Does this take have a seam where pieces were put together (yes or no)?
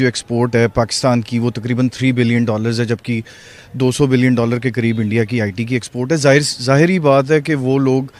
no